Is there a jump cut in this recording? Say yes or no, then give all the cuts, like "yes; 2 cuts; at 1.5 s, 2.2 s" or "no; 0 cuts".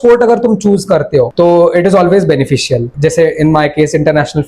yes; 2 cuts; at 1.3 s, 2.9 s